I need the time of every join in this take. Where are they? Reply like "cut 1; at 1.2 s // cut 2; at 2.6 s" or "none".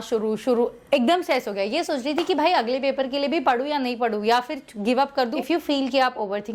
cut 1; at 5.3 s

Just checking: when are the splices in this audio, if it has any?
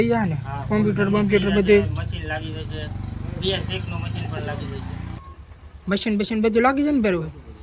cut 1; at 5.1 s

